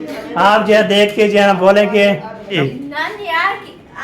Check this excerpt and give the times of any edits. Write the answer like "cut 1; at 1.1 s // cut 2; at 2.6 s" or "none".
cut 1; at 2.6 s